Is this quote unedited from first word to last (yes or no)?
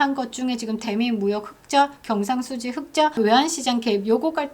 no